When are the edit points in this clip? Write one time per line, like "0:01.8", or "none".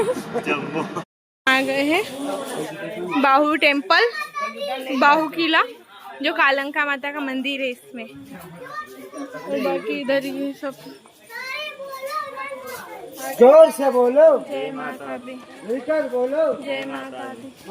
0:01.0